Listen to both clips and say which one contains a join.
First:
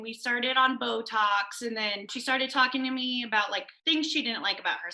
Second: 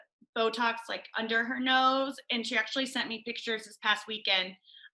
first; 2 cuts; at 2.1 s, 3.7 s

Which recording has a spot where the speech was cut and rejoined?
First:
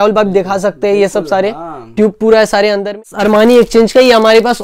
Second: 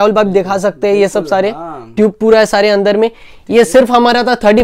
first; 1 cut; at 3.1 s

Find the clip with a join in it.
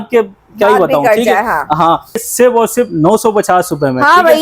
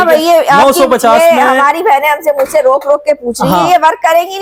first; 1 cut; at 2.3 s

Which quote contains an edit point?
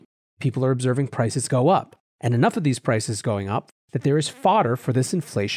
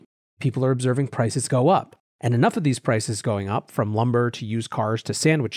first; 1 cut; at 3.7 s

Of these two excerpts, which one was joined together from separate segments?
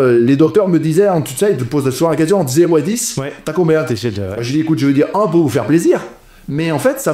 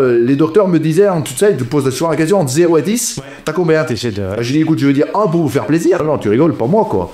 second; 1 cut; at 6.0 s

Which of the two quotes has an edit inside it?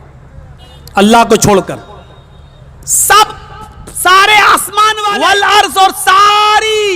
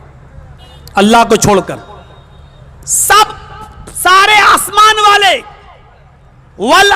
first; 1 cut; at 5.0 s

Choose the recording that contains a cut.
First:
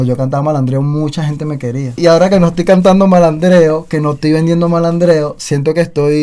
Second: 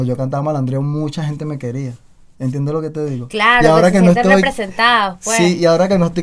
first; 1 cut; at 2.0 s

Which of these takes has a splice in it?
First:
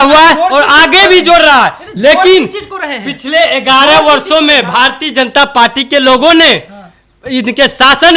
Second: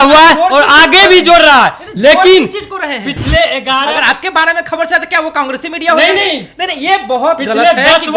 second; 1 cut; at 3.8 s

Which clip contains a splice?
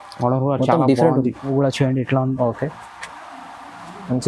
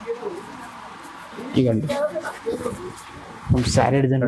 first; 1 cut; at 1.5 s

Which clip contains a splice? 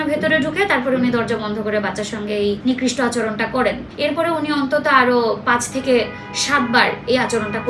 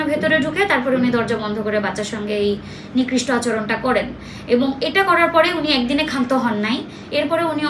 first; 2 cuts; at 2.6 s, 3.9 s

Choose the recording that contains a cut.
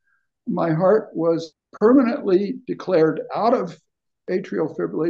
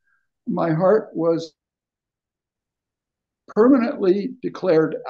first; 1 cut; at 1.6 s

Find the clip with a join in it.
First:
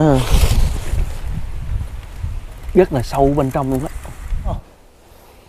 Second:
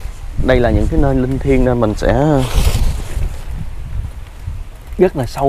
first; 1 cut; at 4.6 s

